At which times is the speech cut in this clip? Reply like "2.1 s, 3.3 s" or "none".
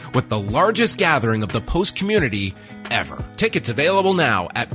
3.2 s